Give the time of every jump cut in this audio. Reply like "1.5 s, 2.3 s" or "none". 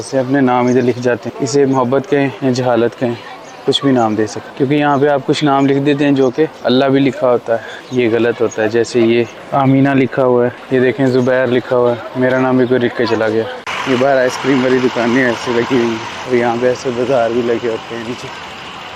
1.3 s, 2.4 s, 4.4 s, 6.6 s, 7.8 s, 9.4 s, 10.6 s, 13.7 s, 16.1 s